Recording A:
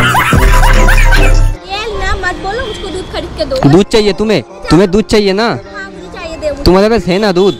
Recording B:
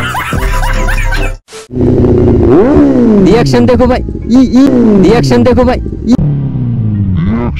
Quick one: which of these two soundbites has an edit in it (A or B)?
A